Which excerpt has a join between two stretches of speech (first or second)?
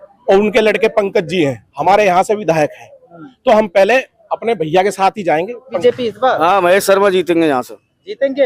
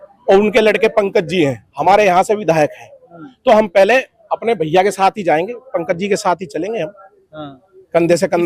first